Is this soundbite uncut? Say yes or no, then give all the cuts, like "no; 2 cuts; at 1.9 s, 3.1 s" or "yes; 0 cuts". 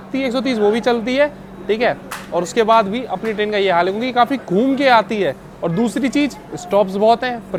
yes; 0 cuts